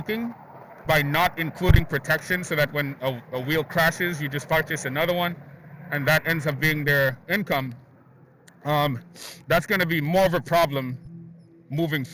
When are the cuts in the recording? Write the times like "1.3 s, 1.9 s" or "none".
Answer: none